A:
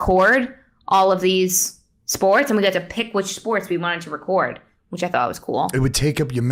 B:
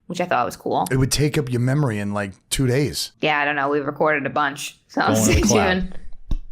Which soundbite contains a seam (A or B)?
B